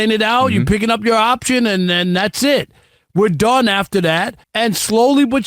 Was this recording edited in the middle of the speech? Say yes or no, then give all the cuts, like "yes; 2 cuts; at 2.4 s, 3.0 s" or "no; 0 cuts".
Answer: yes; 1 cut; at 4.4 s